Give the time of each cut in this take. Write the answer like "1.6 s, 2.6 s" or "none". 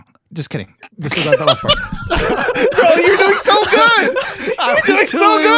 none